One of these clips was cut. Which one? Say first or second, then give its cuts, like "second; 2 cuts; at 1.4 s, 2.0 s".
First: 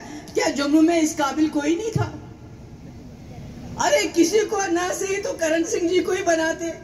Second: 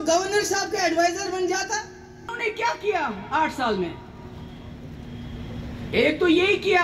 second; 1 cut; at 2.3 s